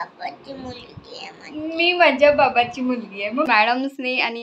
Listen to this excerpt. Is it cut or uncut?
cut